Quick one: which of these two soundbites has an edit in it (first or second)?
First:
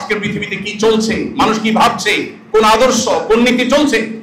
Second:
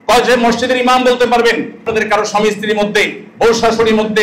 second